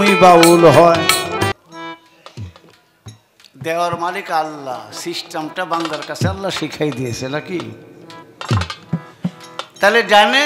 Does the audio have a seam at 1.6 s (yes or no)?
yes